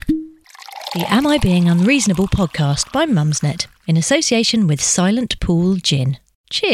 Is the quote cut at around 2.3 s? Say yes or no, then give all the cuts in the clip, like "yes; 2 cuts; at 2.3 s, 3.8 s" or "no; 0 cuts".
no; 0 cuts